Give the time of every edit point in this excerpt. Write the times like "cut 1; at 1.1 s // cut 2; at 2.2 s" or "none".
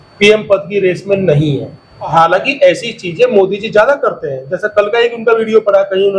cut 1; at 2.1 s